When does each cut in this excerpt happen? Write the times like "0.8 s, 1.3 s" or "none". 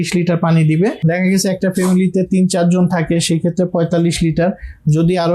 1.2 s